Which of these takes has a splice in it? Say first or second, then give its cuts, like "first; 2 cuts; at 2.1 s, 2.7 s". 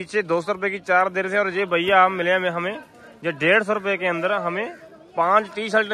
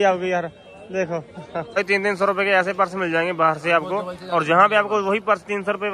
second; 1 cut; at 1.8 s